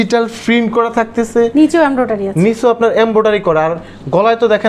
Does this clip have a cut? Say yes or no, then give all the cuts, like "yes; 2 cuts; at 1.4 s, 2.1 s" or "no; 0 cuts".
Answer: no; 0 cuts